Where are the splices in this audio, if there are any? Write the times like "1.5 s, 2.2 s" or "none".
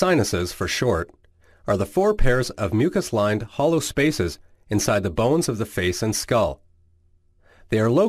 4.1 s